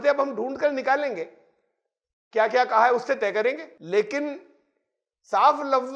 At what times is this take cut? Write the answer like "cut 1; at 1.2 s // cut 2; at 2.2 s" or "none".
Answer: cut 1; at 3.7 s